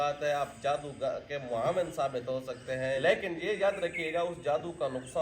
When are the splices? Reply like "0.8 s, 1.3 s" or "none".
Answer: 3.0 s